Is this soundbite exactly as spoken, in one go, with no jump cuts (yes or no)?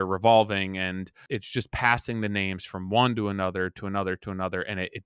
no